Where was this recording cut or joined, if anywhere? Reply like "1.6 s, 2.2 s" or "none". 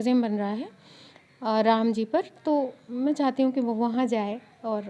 none

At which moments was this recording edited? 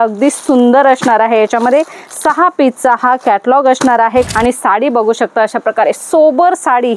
4.3 s

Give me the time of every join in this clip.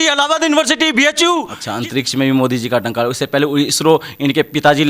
1.6 s

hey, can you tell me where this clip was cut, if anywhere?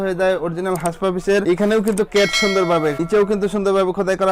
1.4 s

